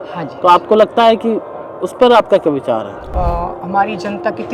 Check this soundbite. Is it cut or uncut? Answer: cut